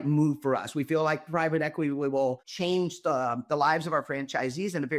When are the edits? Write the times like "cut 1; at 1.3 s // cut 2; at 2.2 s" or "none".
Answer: cut 1; at 2.5 s